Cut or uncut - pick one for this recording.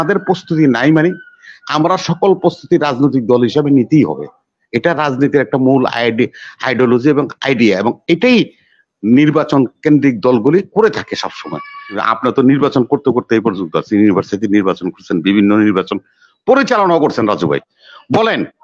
cut